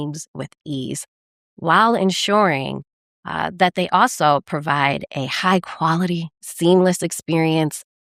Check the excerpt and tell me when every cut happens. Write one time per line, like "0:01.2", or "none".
none